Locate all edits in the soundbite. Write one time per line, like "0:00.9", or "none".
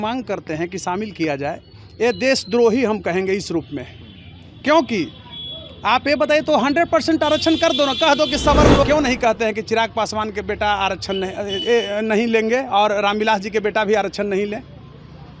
0:08.9